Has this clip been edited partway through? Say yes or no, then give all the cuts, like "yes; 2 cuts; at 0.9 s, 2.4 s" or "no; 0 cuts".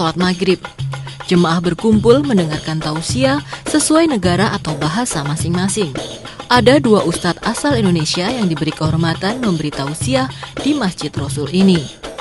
yes; 1 cut; at 4.2 s